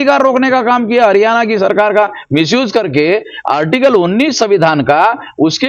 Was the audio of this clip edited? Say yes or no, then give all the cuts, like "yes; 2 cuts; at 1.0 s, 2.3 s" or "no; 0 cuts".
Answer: no; 0 cuts